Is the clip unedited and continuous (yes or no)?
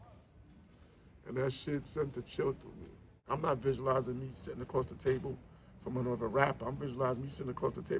no